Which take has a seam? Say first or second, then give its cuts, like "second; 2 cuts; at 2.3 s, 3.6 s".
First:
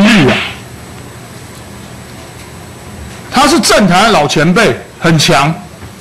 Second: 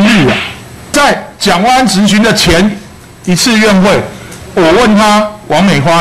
second; 1 cut; at 0.9 s